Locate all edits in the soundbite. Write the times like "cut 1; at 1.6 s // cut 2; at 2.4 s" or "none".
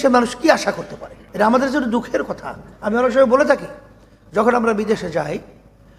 cut 1; at 1.2 s